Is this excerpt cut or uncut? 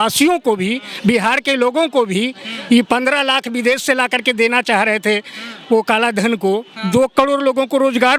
uncut